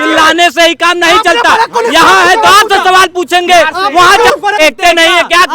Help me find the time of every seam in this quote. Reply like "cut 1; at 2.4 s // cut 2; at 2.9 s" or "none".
cut 1; at 4.6 s

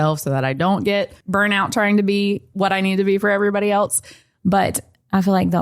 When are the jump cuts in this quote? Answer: cut 1; at 1.2 s // cut 2; at 2.5 s // cut 3; at 4.2 s

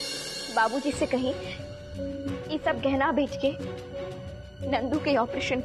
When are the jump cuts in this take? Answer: none

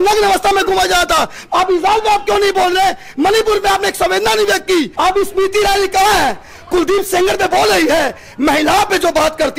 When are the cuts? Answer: cut 1; at 4.9 s

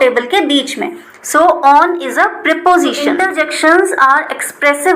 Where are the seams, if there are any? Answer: cut 1; at 3.2 s

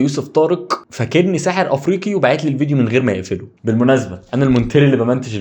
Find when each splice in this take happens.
cut 1; at 3.5 s

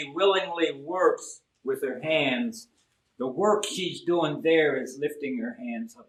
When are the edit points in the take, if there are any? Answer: none

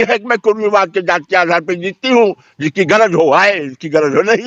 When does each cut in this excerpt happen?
none

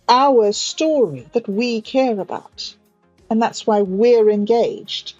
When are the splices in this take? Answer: cut 1; at 1.2 s

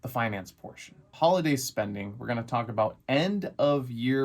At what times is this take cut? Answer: cut 1; at 1.1 s

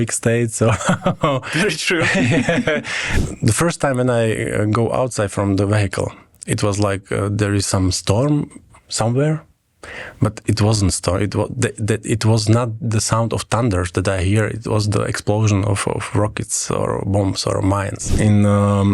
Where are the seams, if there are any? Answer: cut 1; at 3.0 s // cut 2; at 18.0 s

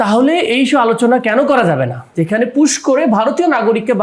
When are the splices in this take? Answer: cut 1; at 2.0 s

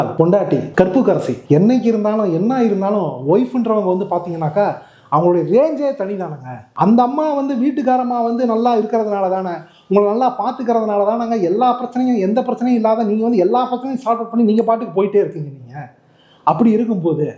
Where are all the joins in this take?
none

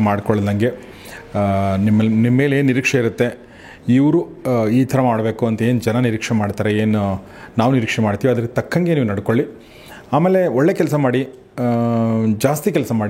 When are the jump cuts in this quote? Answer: none

